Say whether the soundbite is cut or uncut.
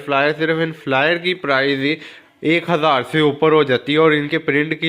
uncut